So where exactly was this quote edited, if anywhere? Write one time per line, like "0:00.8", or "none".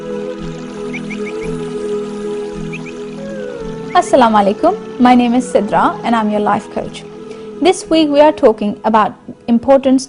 0:07.1